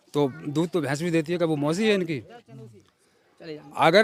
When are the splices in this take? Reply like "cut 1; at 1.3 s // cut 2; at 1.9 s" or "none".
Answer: none